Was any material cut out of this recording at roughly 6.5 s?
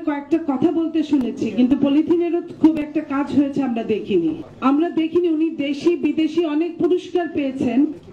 no; 0 cuts

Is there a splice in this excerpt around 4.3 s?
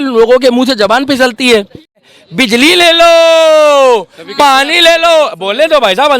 no; 1 cut; at 2.0 s

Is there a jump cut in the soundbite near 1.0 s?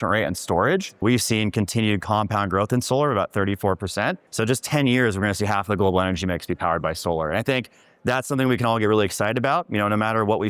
yes; 2 cuts; at 1.0 s, 4.3 s

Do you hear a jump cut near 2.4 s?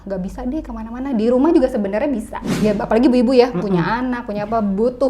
yes; 1 cut; at 2.4 s

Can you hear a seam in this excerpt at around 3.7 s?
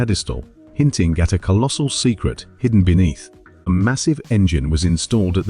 yes; 1 cut; at 3.7 s

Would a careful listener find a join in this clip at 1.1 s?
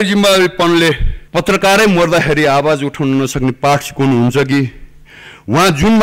yes; 1 cut; at 1.1 s

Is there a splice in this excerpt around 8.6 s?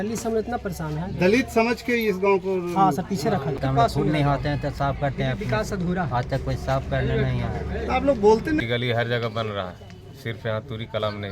yes; 2 cuts; at 3.6 s, 8.6 s

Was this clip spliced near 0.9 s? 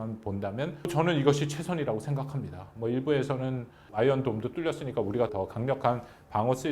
yes; 2 cuts; at 0.9 s, 5.3 s

